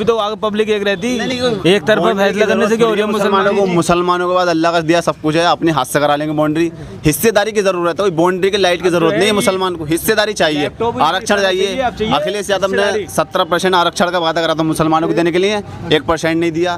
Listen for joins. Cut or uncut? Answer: uncut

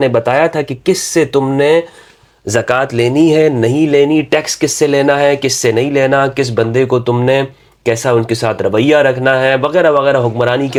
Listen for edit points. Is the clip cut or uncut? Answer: uncut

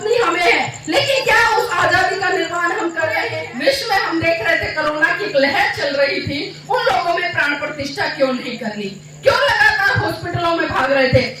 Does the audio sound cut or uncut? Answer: cut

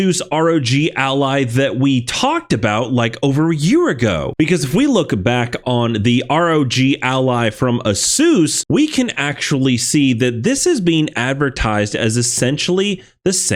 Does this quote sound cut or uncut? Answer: uncut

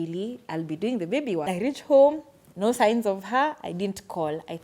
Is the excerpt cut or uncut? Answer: cut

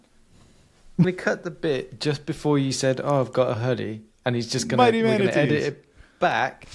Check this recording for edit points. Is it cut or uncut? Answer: cut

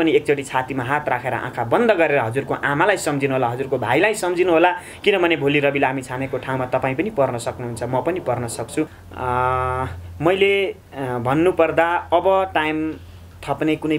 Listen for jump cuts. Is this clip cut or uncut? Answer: cut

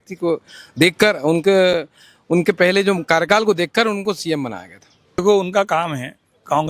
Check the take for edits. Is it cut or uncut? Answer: cut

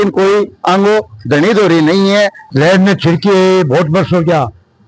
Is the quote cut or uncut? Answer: cut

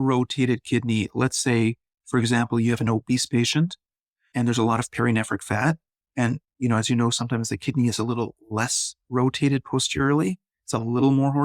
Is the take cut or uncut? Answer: uncut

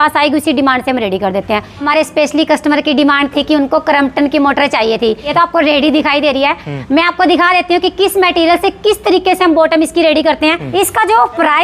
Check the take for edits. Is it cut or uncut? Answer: cut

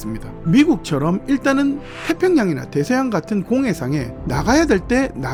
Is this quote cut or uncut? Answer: uncut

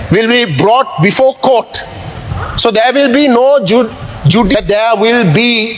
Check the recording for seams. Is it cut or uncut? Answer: cut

